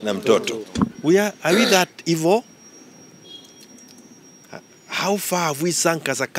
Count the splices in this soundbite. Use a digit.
0